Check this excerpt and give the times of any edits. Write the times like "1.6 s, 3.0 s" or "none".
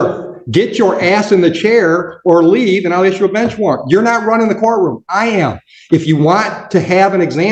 none

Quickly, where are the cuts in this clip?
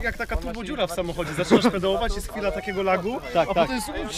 none

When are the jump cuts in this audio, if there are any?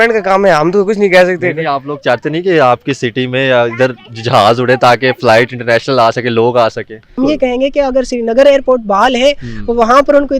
7.2 s

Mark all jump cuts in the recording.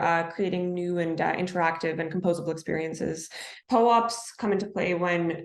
3.5 s

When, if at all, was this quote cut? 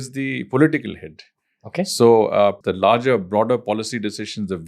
2.6 s

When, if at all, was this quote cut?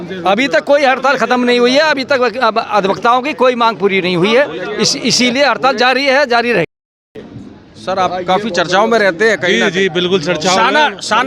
6.6 s

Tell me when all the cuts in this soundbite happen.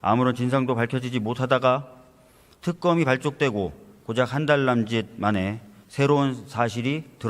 4.4 s

